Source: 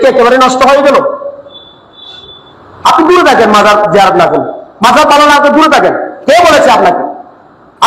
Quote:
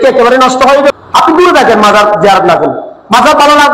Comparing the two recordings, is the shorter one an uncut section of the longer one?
no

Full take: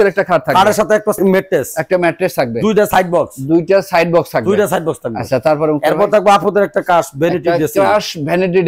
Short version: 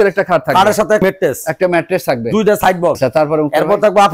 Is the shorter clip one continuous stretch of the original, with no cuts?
no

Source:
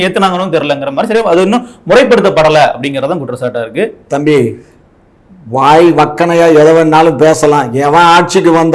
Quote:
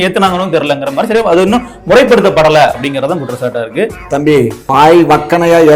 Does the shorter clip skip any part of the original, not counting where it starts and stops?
yes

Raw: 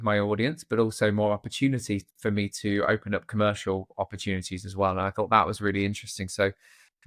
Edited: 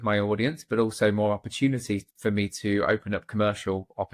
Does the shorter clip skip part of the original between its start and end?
no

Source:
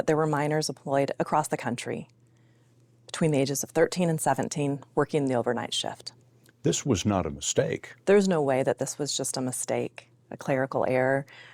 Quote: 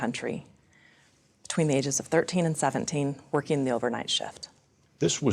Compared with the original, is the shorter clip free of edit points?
yes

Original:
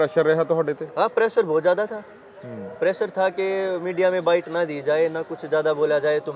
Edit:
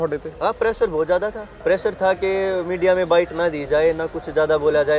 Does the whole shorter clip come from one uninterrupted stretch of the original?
no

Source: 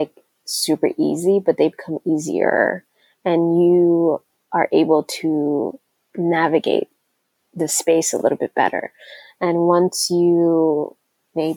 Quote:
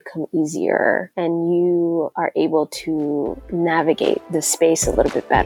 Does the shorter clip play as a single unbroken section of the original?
no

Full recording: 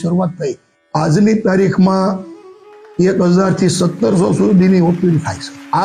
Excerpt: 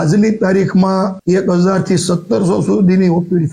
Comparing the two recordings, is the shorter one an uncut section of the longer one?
no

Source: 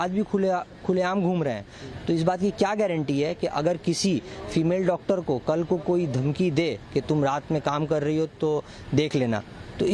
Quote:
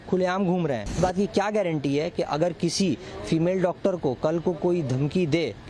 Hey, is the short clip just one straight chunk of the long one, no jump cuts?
no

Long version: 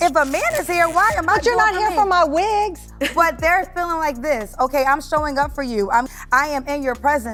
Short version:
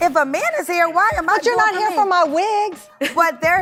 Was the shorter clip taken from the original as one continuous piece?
yes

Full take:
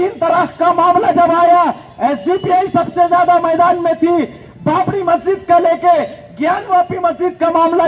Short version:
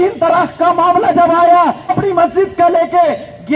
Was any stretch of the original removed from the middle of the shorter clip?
yes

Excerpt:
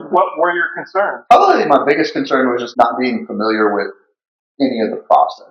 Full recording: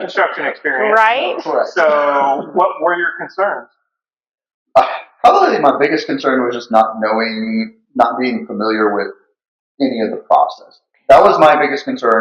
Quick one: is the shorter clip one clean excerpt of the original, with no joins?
no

